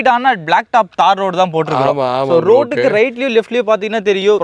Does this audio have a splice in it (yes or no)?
no